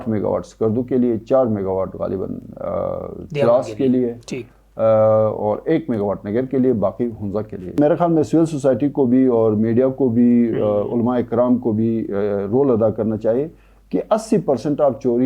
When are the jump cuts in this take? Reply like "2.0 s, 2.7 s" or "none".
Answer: 7.8 s